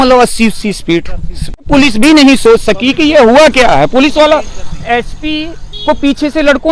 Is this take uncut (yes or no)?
no